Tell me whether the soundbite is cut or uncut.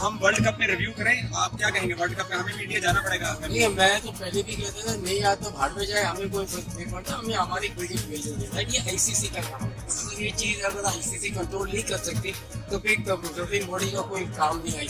uncut